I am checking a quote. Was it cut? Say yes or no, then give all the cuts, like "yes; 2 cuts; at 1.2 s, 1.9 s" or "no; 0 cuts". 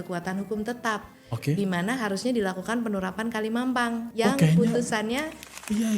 yes; 1 cut; at 4.1 s